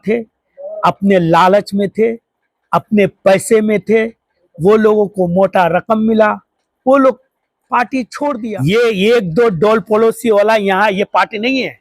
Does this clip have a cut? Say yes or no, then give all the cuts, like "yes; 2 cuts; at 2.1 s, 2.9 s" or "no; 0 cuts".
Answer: yes; 1 cut; at 8.4 s